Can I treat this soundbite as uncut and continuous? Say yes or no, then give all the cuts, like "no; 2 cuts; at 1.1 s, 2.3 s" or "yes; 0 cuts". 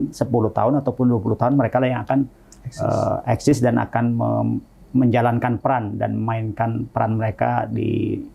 yes; 0 cuts